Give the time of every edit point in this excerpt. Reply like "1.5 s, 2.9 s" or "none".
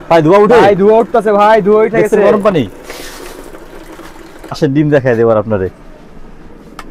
4.6 s

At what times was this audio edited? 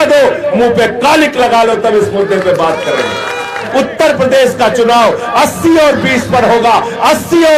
3.6 s

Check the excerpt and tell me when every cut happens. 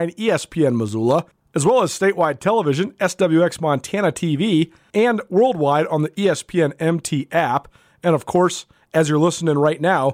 1.4 s, 4.8 s

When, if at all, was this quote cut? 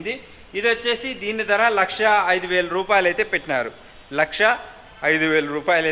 none

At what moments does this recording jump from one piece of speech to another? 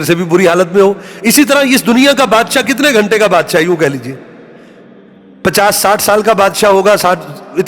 none

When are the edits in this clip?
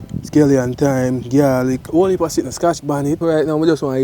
1.8 s, 3.2 s

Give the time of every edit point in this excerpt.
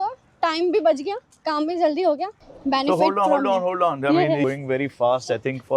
2.3 s, 4.4 s

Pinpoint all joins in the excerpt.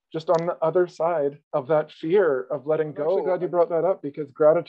1.4 s, 3.2 s

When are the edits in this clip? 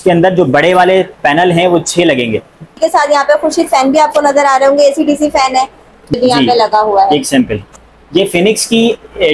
2.7 s, 6.1 s, 7.7 s

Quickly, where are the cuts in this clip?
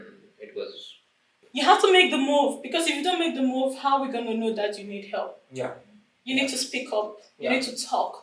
1.4 s

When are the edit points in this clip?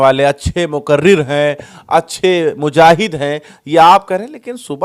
none

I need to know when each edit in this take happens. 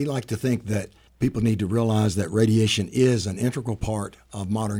none

